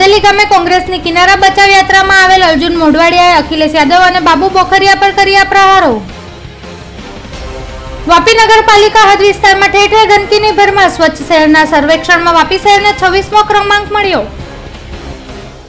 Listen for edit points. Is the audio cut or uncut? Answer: uncut